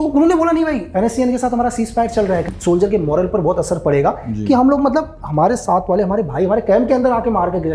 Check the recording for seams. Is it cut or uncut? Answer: cut